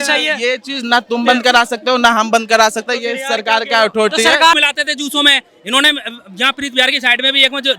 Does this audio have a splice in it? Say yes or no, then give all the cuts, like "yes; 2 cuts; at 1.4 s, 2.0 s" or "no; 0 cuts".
yes; 1 cut; at 4.6 s